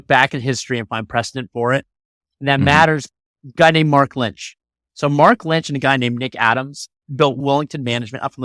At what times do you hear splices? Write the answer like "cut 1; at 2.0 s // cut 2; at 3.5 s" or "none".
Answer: cut 1; at 3.1 s // cut 2; at 7.4 s